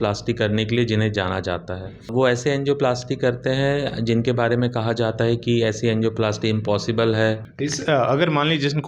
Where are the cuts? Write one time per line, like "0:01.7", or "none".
0:02.1
0:07.5